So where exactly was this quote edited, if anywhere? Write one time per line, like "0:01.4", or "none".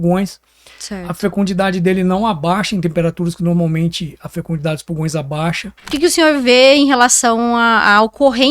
0:05.9